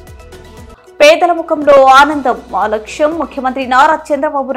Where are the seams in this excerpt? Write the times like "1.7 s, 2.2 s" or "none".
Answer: none